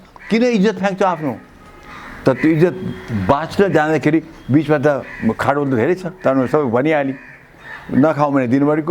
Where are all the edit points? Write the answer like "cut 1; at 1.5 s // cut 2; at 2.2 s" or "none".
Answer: none